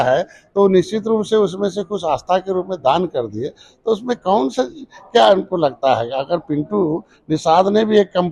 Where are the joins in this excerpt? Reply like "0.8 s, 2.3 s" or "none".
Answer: none

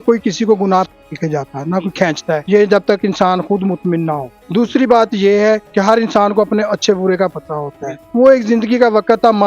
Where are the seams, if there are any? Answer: 1.0 s, 2.4 s, 4.4 s, 5.7 s, 8.0 s

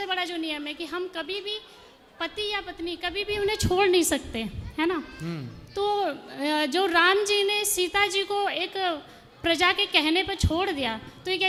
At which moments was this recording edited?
none

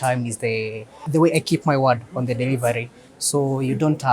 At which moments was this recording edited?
0.9 s

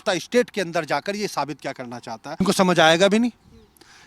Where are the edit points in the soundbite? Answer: 2.4 s

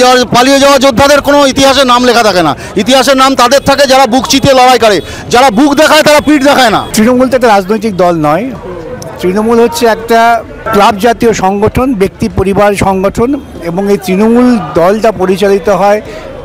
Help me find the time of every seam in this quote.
6.9 s, 10.6 s

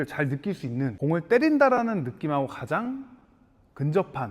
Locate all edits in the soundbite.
0.9 s

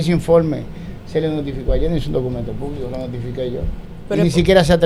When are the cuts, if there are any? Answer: none

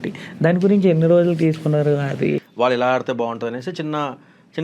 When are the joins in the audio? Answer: 2.4 s

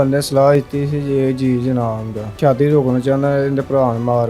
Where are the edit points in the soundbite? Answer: 2.3 s

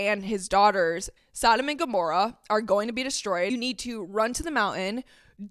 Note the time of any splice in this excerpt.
1.1 s, 3.5 s

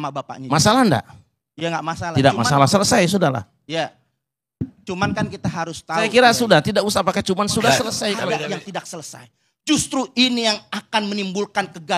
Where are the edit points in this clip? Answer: 8.4 s

